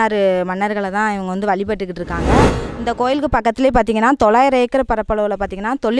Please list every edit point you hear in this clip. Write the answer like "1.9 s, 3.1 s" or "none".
2.6 s